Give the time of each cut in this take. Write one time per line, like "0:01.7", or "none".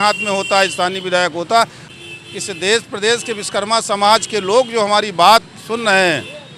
0:01.9

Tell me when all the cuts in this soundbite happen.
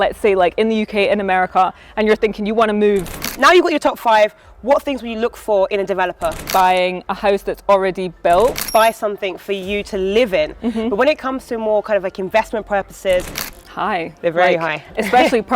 0:03.3
0:06.4
0:08.6
0:13.4

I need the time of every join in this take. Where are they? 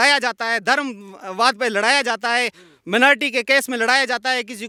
none

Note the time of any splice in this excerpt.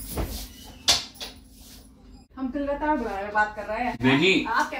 0:02.3
0:04.0

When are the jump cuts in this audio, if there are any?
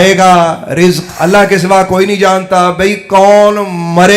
0:01.1

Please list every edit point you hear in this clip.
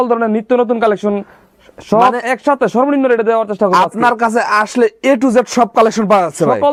none

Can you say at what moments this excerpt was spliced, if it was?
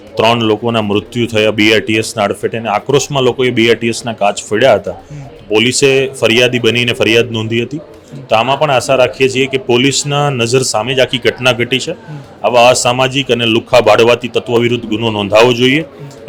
none

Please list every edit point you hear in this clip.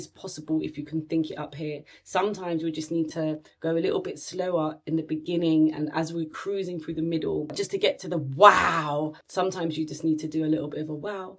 0:07.5
0:09.2

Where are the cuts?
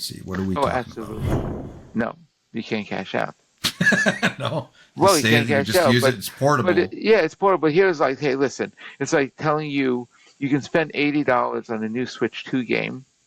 0:01.2

